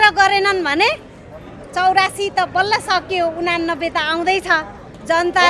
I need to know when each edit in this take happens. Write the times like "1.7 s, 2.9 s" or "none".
none